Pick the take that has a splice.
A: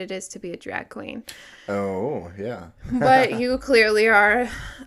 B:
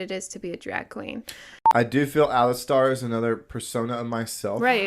B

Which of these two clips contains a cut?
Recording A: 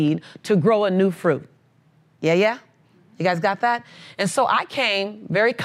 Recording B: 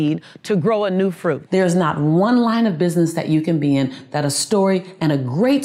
B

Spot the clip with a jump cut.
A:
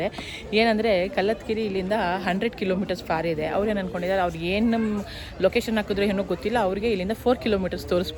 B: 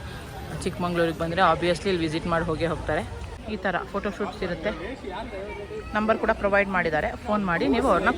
B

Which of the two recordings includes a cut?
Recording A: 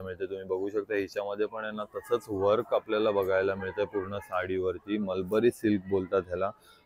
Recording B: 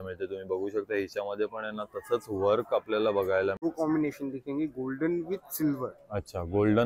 B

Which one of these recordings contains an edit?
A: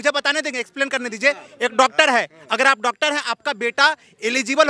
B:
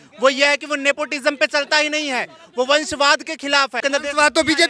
B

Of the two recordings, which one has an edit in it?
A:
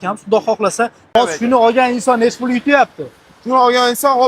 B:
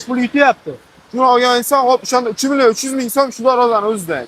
A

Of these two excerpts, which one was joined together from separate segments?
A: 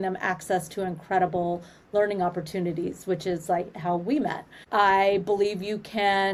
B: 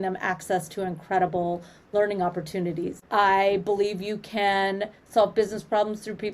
B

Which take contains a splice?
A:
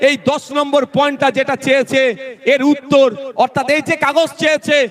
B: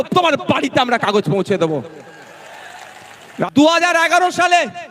B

